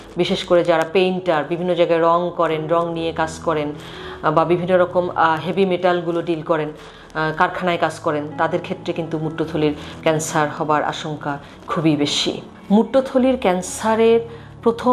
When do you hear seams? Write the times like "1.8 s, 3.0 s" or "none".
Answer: 12.5 s

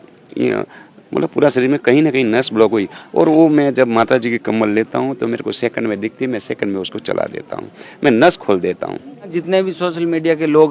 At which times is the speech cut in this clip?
9.3 s

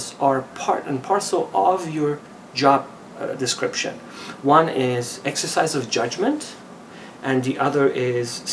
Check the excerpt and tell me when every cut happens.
none

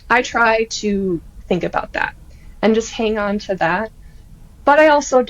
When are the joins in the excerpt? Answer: none

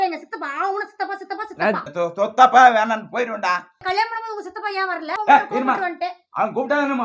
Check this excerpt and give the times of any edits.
1.9 s, 3.7 s, 5.1 s

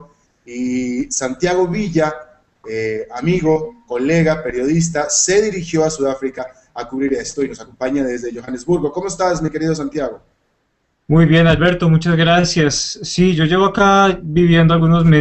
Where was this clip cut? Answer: none

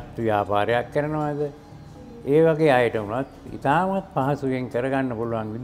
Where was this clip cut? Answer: none

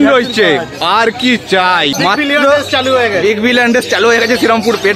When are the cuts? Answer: 1.9 s

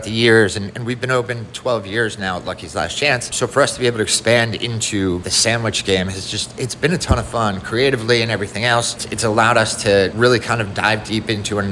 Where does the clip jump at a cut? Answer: 3.3 s, 5.3 s, 9.0 s, 10.1 s

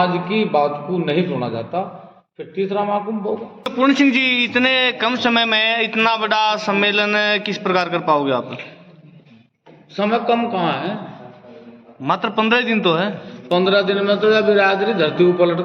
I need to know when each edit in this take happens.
3.7 s

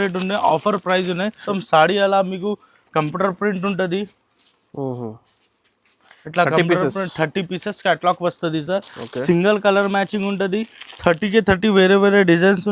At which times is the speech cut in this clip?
1.4 s

